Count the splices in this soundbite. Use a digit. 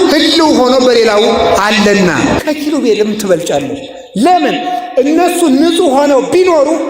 1